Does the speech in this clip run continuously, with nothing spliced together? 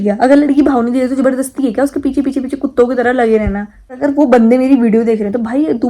no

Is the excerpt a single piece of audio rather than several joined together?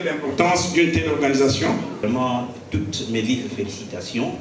no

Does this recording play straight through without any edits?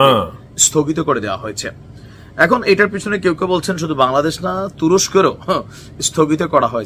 yes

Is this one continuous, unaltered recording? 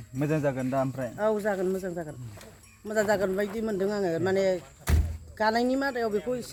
yes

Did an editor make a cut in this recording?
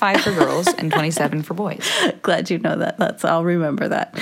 yes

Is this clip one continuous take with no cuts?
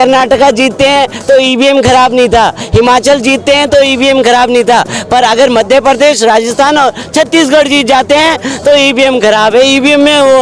yes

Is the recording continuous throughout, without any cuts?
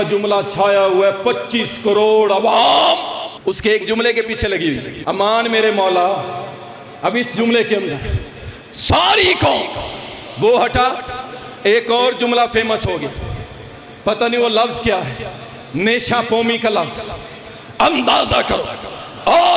no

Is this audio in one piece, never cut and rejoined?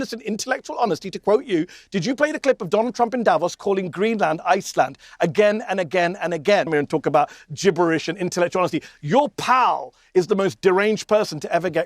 no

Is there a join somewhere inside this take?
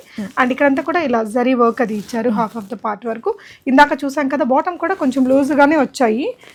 no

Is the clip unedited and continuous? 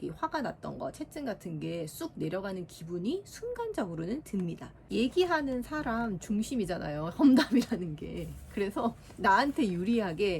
no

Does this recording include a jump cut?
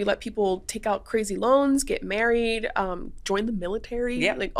no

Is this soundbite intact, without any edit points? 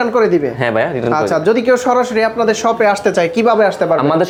yes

